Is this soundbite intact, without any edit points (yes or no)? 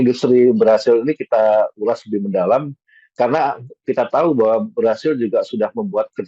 yes